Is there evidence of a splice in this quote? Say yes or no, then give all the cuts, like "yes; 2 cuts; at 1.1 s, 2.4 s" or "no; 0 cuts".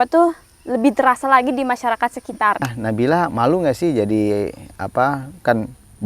yes; 1 cut; at 2.7 s